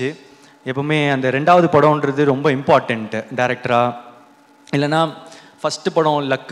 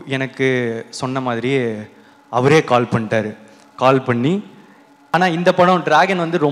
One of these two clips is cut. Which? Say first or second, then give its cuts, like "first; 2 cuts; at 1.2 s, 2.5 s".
second; 1 cut; at 5.1 s